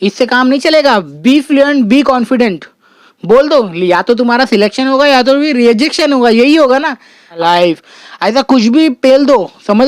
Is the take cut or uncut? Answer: cut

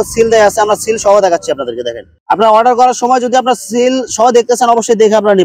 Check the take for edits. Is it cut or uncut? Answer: uncut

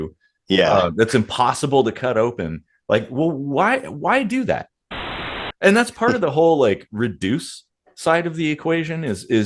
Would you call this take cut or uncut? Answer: cut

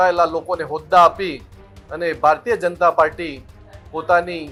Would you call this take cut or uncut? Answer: uncut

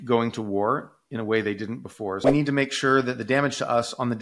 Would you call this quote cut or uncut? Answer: cut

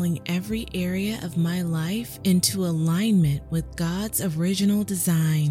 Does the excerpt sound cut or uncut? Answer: uncut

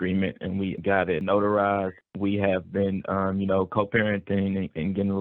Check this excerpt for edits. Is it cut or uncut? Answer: cut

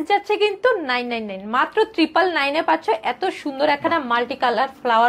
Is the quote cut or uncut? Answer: uncut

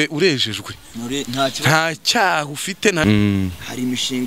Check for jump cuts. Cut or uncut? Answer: cut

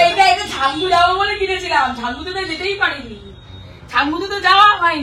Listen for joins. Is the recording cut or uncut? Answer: uncut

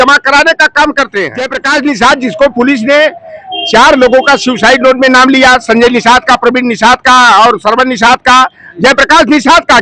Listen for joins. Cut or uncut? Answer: cut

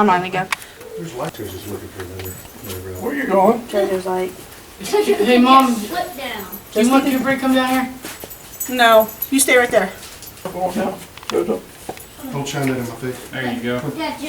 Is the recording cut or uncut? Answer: cut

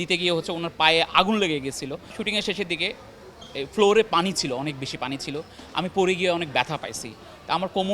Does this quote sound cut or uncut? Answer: cut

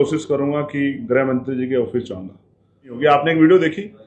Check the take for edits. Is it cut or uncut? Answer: cut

